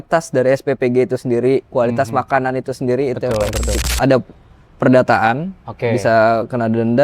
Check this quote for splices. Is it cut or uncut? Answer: cut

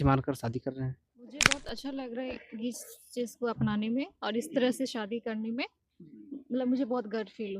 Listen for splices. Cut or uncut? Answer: cut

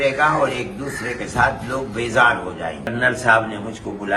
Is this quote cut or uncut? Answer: cut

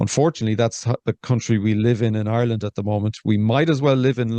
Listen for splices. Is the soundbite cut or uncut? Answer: uncut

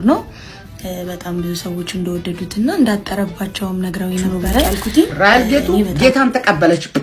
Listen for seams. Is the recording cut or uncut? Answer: cut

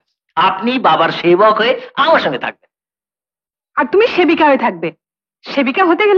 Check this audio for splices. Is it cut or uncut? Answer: uncut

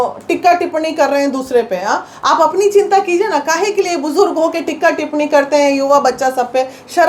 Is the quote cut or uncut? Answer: uncut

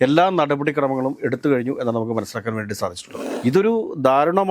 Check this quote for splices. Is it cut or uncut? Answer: cut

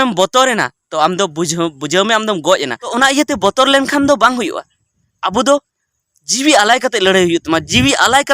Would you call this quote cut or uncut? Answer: cut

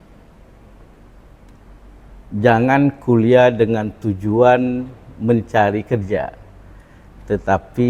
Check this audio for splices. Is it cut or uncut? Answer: uncut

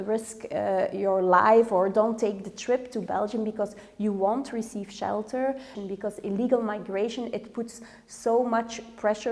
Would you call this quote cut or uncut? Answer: cut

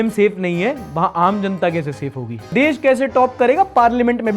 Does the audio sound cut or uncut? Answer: cut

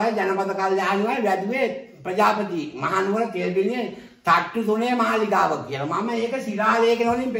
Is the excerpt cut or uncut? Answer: uncut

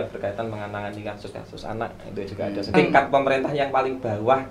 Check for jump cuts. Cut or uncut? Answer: cut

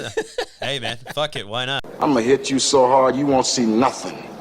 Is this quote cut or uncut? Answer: cut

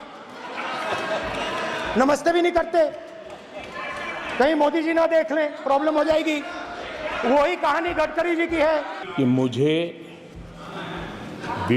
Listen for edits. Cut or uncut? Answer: cut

